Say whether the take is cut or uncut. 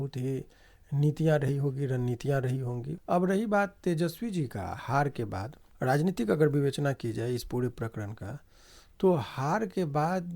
cut